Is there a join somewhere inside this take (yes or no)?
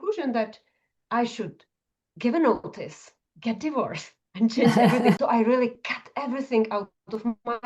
yes